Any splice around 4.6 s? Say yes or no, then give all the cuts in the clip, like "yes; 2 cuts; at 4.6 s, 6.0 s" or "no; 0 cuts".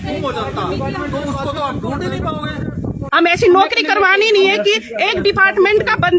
no; 1 cut; at 3.0 s